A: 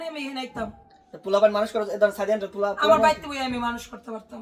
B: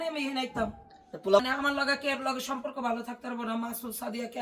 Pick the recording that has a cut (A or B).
B